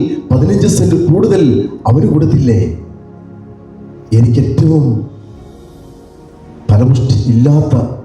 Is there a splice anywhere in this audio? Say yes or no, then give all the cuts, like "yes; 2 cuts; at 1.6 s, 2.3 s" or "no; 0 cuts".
no; 0 cuts